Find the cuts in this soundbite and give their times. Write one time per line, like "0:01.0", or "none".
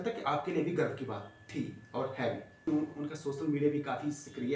0:02.6